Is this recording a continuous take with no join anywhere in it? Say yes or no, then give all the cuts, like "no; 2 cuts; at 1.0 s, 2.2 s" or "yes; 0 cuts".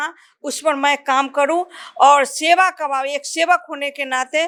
yes; 0 cuts